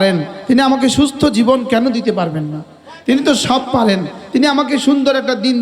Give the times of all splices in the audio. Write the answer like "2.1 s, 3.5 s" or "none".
none